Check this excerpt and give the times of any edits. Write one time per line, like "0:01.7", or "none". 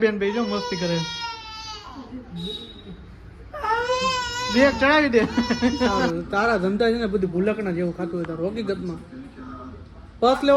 0:06.0